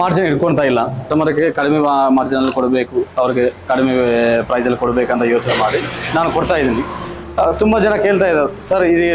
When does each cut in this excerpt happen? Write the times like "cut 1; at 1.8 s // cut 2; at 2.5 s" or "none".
cut 1; at 1.0 s